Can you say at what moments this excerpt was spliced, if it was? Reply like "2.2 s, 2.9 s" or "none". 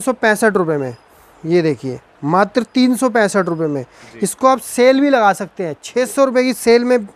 none